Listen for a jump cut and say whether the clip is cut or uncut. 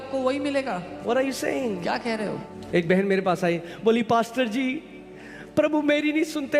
cut